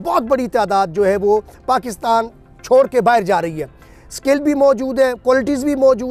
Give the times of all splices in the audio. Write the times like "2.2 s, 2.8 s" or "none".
none